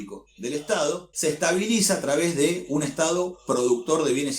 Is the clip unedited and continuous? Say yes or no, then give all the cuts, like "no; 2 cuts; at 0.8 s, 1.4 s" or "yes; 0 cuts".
no; 1 cut; at 1.1 s